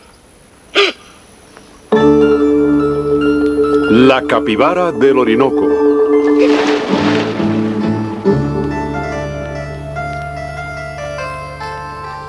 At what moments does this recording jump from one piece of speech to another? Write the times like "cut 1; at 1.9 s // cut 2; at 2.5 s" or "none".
none